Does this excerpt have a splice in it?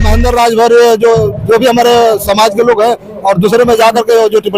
no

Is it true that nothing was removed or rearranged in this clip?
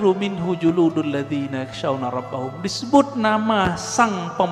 yes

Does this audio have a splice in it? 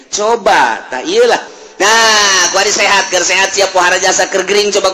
yes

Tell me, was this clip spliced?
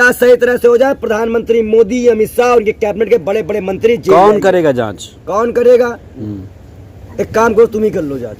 no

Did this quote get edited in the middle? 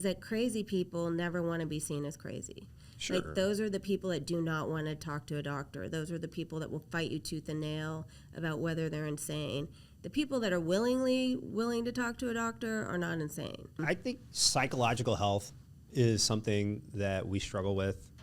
yes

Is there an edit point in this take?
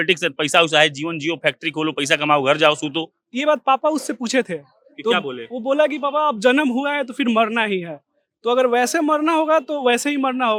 no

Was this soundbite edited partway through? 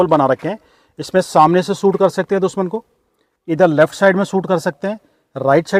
no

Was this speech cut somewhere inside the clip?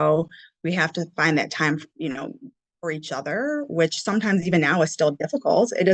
no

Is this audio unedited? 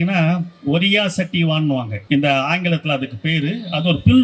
no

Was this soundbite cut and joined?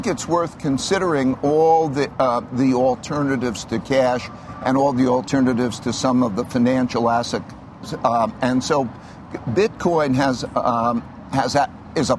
no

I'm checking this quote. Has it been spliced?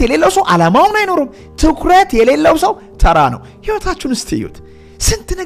no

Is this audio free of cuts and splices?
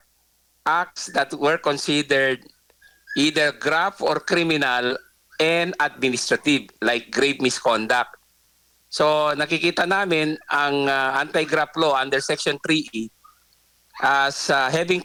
yes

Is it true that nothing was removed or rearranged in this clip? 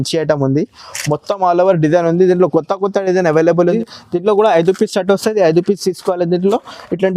no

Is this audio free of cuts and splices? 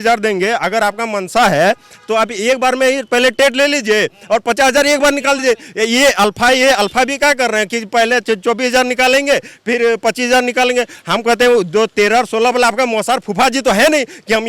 yes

